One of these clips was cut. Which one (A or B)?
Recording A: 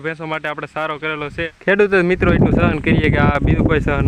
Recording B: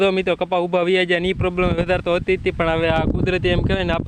A